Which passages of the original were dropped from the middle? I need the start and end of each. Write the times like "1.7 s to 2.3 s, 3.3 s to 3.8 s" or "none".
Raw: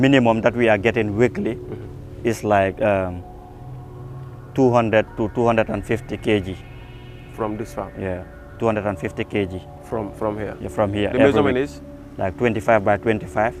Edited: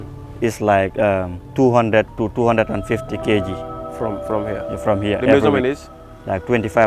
3.2 s to 4.4 s, 6.8 s to 9.7 s

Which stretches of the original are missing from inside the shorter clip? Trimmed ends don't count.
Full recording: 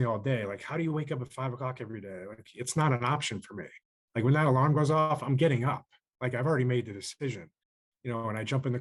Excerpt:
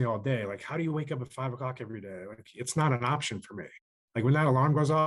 none

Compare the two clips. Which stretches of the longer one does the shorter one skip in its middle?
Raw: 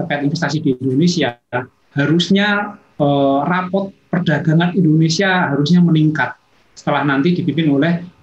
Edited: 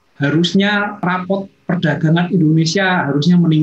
2.8 s to 3.5 s

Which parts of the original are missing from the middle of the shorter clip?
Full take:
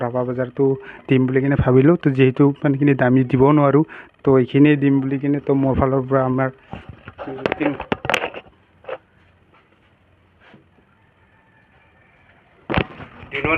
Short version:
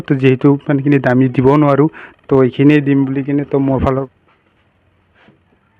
6.0 s to 9.3 s

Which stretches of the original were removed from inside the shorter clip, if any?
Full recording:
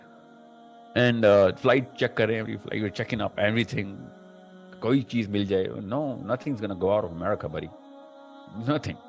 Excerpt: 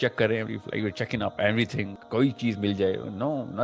3.9 s to 4.7 s

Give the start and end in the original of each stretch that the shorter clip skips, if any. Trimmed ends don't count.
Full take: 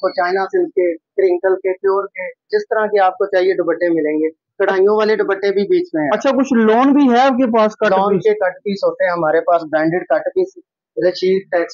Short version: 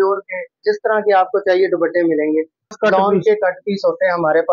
4.6 s to 7.7 s

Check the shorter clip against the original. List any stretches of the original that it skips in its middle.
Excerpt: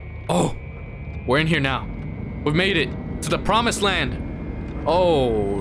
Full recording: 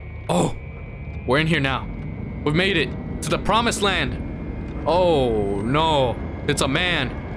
none

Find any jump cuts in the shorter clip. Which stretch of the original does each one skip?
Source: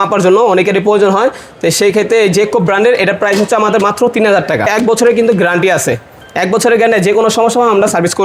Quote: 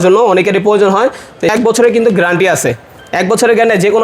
1.7 s to 4.7 s

